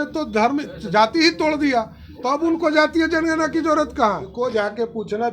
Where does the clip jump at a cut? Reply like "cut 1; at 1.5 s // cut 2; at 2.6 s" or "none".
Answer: cut 1; at 4.3 s

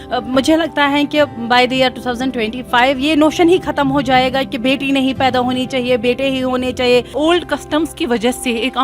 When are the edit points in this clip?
cut 1; at 7.1 s

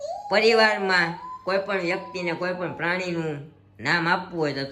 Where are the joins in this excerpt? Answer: none

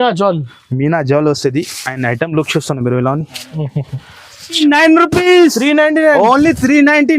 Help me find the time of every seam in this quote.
cut 1; at 4.6 s

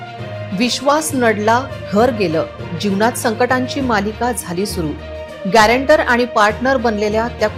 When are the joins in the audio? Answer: none

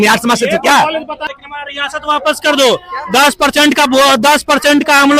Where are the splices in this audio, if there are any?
cut 1; at 1.2 s

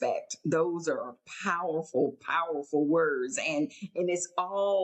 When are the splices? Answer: none

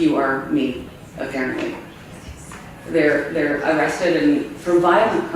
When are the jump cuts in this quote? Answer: none

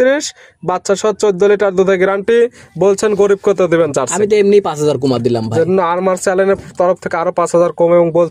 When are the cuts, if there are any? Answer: none

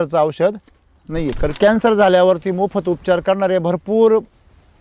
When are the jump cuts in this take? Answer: cut 1; at 1.6 s

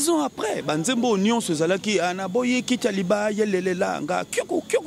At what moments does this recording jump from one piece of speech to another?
none

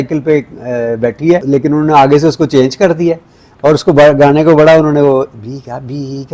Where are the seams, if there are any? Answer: cut 1; at 1.4 s

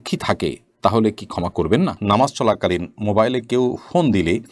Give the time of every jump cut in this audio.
cut 1; at 2.0 s

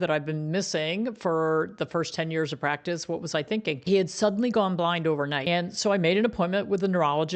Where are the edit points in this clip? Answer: cut 1; at 3.8 s // cut 2; at 5.5 s

